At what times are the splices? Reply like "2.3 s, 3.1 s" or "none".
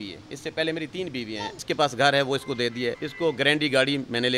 1.6 s, 3.1 s